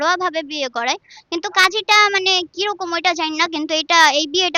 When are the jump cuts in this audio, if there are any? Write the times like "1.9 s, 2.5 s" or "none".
none